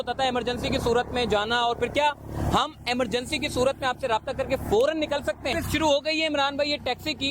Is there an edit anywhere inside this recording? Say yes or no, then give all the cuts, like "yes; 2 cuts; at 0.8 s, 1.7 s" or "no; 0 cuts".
yes; 1 cut; at 5.5 s